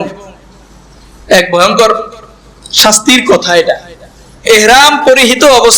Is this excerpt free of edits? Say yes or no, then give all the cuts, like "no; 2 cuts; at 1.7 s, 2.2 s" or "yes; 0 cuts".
no; 1 cut; at 4.4 s